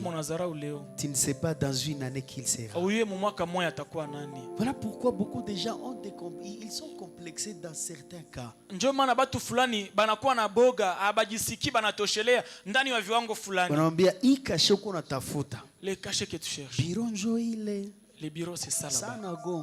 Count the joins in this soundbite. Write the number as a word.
zero